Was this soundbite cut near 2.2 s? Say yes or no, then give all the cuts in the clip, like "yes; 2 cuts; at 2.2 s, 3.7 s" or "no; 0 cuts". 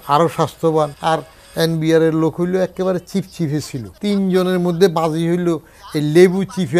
no; 2 cuts; at 1.0 s, 3.8 s